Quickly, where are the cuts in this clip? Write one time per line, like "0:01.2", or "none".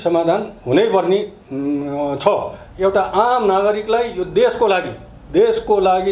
0:02.6